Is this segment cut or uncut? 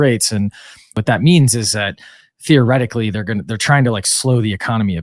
cut